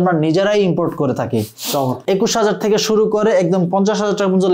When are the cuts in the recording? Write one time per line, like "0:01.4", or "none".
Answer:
0:02.0